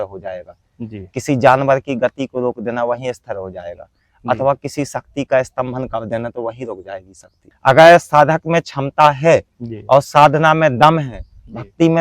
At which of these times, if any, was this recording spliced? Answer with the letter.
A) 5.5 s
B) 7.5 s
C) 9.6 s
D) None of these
B